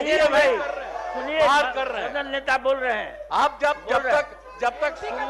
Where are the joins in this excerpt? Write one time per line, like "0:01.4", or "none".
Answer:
none